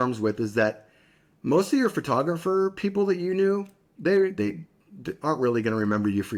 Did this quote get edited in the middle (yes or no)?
no